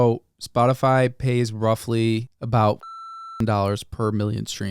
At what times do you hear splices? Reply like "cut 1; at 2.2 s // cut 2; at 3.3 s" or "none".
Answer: cut 1; at 2.3 s

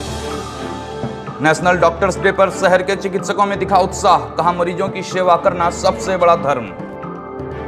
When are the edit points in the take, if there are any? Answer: cut 1; at 0.9 s

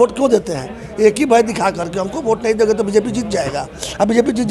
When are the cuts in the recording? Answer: none

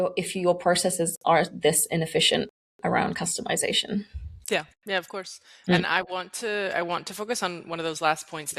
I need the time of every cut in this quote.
none

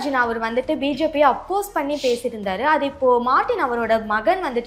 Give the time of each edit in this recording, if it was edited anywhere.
none

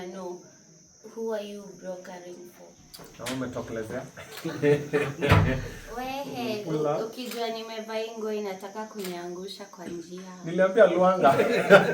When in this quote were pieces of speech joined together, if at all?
cut 1; at 2.6 s

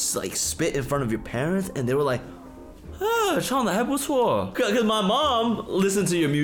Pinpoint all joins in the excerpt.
cut 1; at 4.5 s

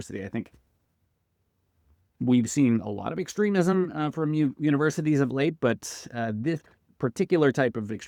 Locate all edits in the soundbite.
none

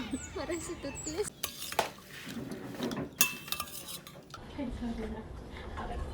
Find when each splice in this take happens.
cut 1; at 4.3 s

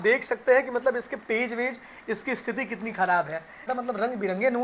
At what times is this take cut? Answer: cut 1; at 3.7 s

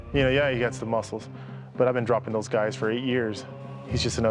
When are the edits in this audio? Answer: none

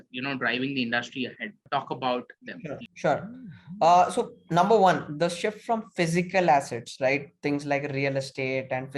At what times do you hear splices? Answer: cut 1; at 1.6 s // cut 2; at 2.9 s

